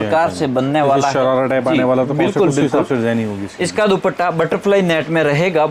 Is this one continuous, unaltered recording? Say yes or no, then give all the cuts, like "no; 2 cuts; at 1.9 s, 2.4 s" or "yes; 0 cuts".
yes; 0 cuts